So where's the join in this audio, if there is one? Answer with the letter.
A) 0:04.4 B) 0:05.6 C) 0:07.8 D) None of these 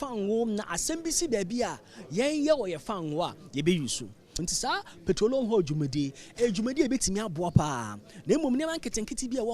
A